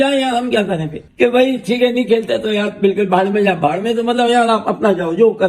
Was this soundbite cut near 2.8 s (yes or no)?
no